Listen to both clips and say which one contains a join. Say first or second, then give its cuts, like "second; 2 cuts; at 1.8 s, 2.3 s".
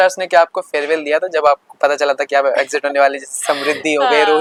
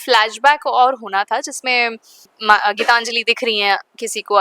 second; 1 cut; at 2.3 s